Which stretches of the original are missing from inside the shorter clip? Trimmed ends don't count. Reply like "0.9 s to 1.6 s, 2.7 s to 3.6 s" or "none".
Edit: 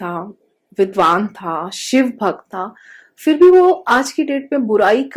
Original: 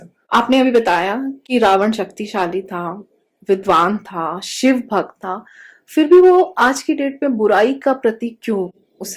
none